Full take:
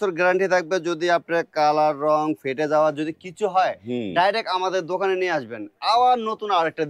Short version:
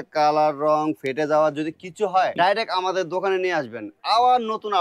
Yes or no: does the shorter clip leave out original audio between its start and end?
yes